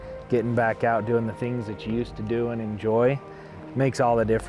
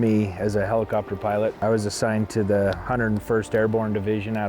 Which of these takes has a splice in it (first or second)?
second